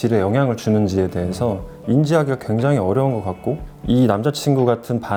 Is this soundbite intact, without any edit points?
yes; 0 cuts

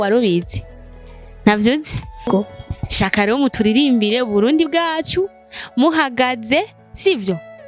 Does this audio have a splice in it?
yes; 1 cut; at 2.3 s

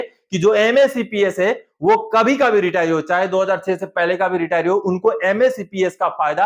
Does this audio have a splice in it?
no; 0 cuts

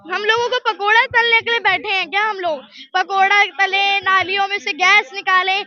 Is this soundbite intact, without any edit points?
yes; 0 cuts

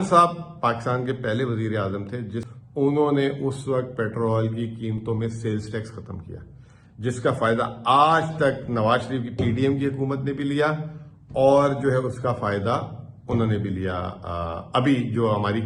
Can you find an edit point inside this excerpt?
yes; 1 cut; at 2.5 s

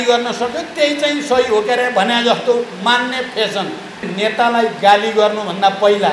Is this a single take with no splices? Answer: no; 1 cut; at 4.1 s

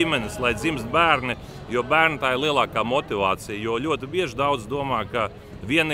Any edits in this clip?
no; 0 cuts

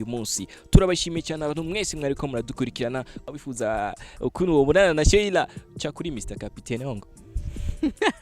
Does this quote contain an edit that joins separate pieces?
yes; 1 cut; at 3.2 s

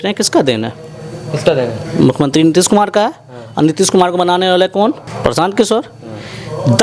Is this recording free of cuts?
no; 1 cut; at 5.1 s

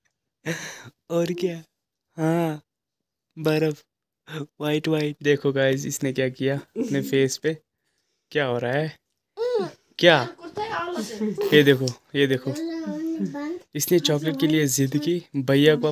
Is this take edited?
yes; 1 cut; at 5.2 s

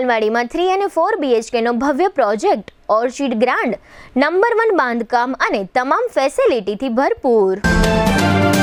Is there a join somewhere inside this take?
no; 0 cuts

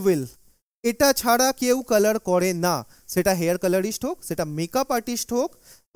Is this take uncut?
yes; 0 cuts

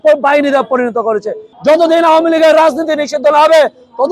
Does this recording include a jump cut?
yes; 1 cut; at 1.5 s

